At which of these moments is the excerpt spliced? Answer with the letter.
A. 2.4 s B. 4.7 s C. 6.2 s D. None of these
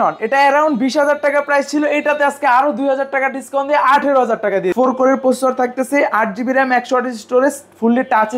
B